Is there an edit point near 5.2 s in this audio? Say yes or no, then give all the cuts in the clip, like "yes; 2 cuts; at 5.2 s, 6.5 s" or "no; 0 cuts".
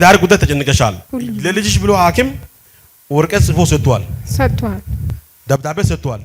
no; 1 cut; at 1.1 s